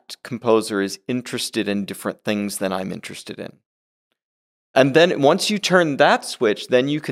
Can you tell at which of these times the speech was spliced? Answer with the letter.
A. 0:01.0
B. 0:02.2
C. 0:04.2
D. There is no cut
D